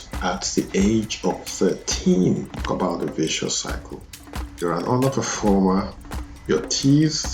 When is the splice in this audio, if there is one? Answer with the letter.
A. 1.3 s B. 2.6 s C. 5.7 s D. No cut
B